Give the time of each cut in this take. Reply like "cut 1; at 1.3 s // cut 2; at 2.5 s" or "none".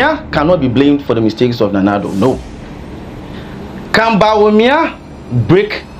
cut 1; at 3.4 s